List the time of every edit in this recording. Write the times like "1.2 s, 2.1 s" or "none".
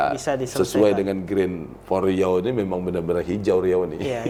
none